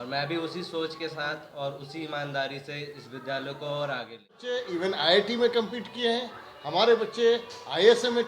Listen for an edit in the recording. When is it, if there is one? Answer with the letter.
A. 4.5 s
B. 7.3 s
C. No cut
A